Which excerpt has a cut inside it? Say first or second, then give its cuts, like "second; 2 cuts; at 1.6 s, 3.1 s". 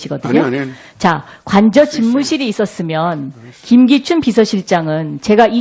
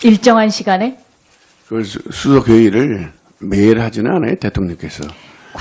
second; 1 cut; at 4.2 s